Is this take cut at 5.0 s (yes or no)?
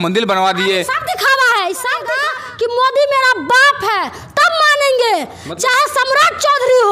no